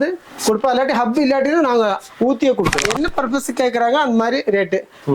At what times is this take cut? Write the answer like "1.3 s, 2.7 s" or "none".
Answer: 2.9 s

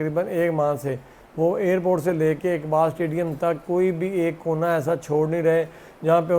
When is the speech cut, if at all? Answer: none

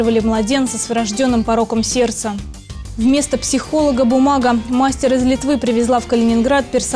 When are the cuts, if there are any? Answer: none

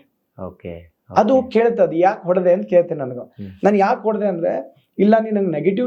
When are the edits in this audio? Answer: none

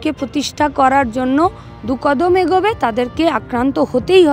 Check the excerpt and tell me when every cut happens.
none

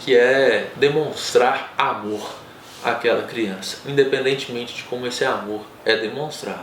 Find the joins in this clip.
none

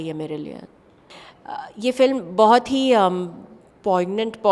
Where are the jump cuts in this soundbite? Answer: 1.0 s

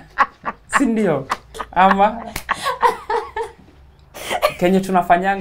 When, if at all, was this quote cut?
none

